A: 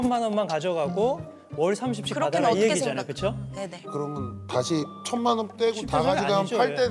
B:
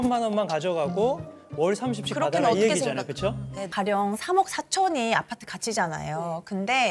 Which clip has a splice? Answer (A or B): B